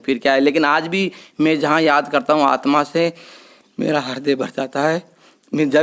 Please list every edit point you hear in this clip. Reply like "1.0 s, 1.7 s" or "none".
none